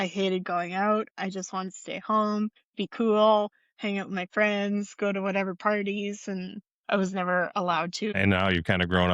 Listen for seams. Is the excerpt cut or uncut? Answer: cut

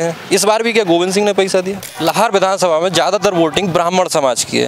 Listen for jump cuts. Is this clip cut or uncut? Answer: cut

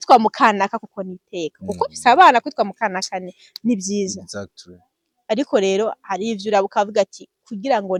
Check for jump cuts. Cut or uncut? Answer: uncut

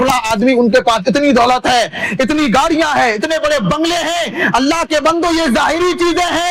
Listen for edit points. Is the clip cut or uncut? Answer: uncut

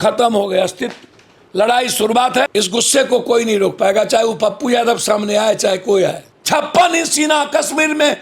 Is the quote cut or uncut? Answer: cut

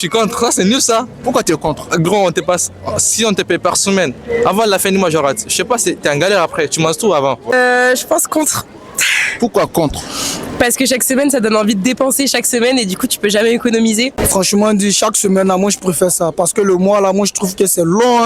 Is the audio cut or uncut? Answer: cut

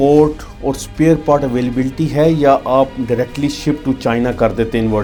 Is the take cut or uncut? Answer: uncut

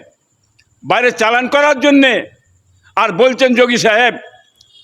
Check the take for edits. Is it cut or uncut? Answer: uncut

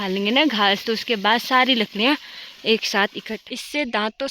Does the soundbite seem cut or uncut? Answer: cut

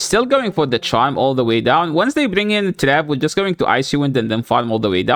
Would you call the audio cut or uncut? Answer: uncut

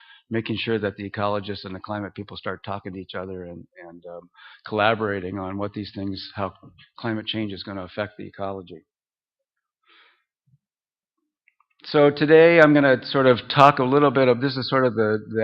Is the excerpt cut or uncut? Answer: cut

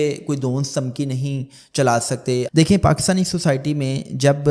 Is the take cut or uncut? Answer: cut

